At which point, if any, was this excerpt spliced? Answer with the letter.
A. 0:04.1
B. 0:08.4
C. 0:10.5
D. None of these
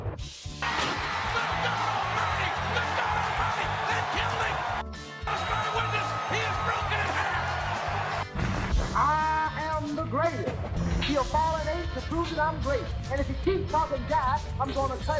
D